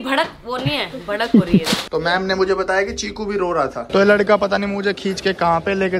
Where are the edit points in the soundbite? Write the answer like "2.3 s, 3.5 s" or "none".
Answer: 1.8 s, 3.8 s